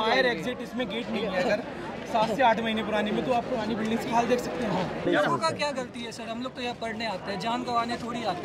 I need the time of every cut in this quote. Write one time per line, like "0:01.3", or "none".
0:05.1